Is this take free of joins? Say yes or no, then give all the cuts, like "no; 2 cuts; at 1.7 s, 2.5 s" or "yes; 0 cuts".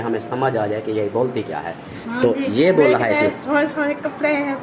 yes; 0 cuts